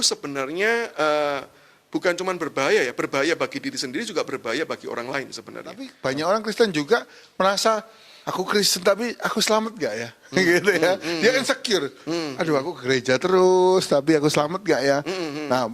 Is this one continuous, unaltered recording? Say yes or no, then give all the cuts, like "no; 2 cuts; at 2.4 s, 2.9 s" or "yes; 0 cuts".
no; 1 cut; at 5.9 s